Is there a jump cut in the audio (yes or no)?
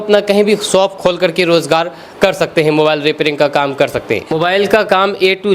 yes